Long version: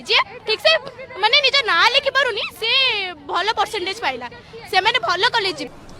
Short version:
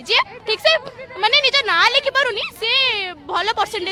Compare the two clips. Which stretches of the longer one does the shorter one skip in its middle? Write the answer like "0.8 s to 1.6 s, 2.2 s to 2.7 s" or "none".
none